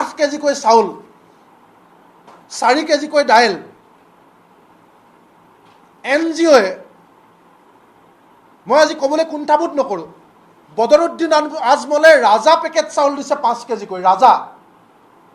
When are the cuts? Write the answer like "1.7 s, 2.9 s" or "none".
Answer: none